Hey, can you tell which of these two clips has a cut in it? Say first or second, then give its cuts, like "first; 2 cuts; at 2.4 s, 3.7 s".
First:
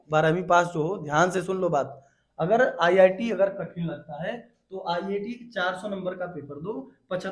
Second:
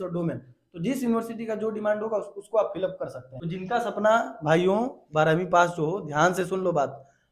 second; 1 cut; at 3.2 s